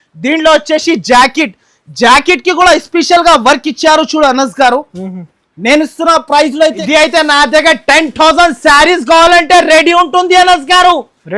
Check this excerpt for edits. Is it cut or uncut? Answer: cut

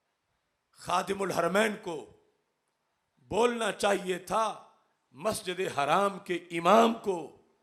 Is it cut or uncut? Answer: uncut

